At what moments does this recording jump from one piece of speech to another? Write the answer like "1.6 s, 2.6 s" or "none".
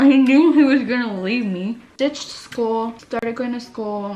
1.9 s, 3.0 s

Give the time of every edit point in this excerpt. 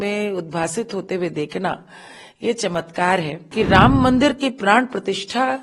3.4 s

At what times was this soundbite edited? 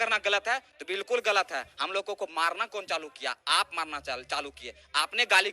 none

